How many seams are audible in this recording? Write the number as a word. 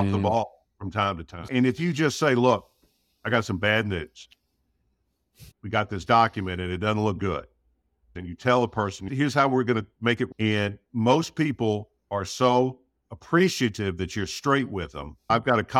four